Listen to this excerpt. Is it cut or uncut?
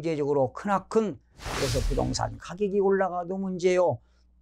cut